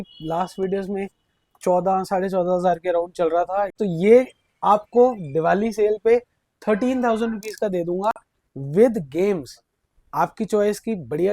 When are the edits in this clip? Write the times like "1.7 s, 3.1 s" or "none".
3.8 s